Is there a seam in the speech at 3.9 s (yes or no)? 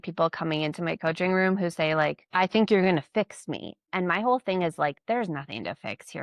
yes